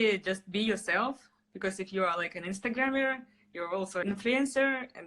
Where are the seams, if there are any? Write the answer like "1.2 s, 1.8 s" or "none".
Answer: 4.0 s

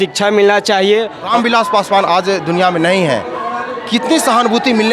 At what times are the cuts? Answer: 1.3 s

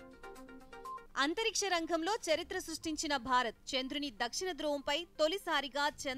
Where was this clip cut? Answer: 1.1 s

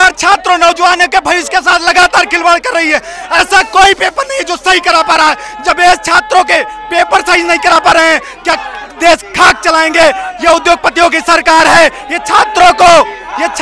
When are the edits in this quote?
none

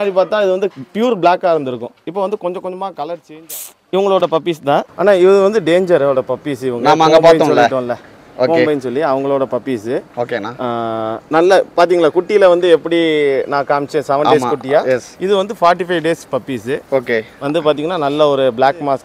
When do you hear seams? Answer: 3.2 s, 4.9 s

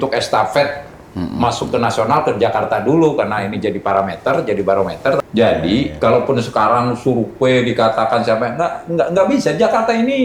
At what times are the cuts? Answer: 5.2 s

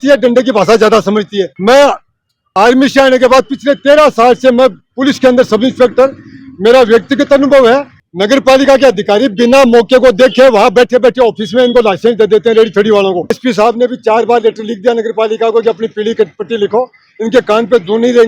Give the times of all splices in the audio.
1.4 s, 8.0 s, 13.4 s

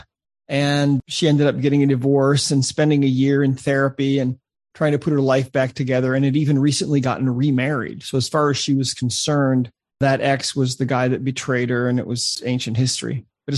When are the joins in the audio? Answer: 12.3 s

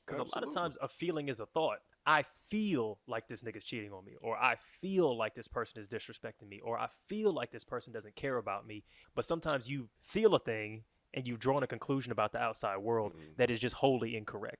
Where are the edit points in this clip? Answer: 1.9 s, 9.0 s

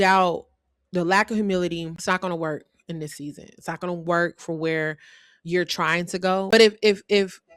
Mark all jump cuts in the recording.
1.9 s, 6.5 s

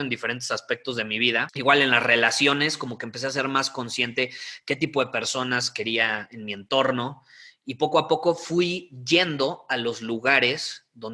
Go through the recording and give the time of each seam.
1.5 s

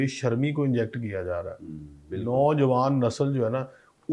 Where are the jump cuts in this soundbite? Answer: none

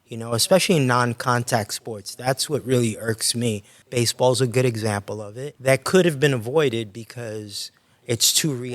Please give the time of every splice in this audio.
3.7 s, 5.5 s

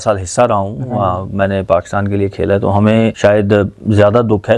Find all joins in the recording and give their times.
3.2 s

